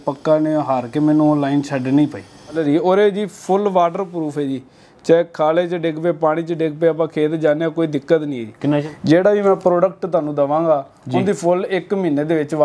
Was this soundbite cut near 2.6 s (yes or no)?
yes